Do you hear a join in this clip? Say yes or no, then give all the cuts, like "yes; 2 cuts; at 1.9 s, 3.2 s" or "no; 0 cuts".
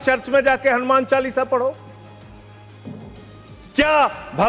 no; 0 cuts